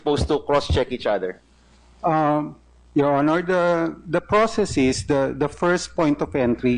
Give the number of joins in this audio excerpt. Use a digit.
1